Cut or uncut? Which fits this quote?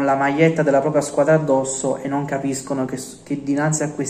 uncut